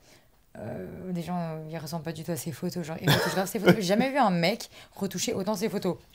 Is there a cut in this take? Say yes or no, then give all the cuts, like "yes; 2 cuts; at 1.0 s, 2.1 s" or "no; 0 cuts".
no; 0 cuts